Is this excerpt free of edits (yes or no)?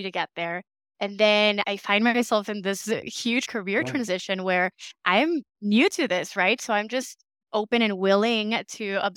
no